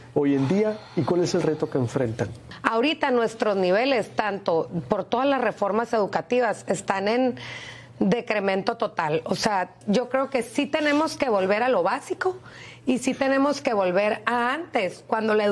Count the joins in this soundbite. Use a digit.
2